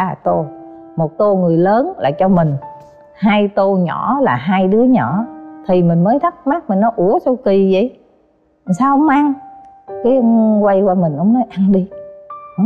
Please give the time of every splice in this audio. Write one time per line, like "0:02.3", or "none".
none